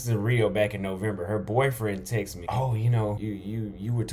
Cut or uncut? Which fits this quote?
cut